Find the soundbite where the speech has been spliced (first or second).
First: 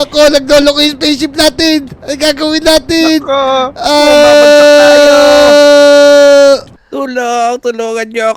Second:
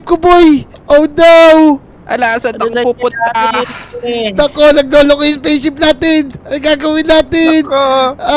first